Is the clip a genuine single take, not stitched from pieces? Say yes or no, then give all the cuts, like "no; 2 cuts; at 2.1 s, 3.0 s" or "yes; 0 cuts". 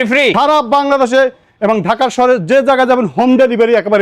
yes; 0 cuts